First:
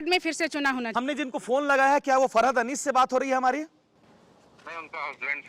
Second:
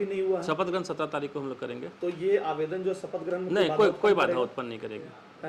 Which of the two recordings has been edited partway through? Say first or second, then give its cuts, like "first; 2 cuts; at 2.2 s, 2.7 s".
first; 1 cut; at 0.9 s